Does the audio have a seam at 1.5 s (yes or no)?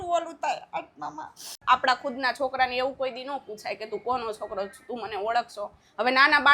yes